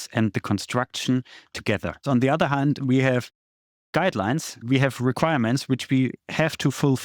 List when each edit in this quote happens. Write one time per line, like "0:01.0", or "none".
0:02.0
0:04.6